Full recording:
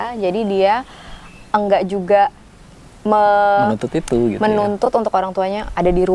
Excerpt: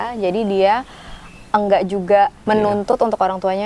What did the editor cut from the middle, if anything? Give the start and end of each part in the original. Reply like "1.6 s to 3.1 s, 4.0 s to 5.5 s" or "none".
2.4 s to 4.4 s